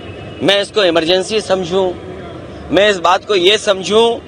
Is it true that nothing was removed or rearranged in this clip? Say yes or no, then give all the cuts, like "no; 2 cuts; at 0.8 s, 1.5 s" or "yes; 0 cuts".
yes; 0 cuts